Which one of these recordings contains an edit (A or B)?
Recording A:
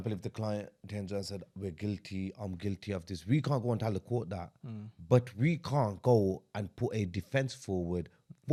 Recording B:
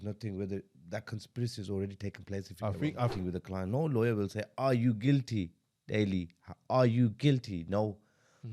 B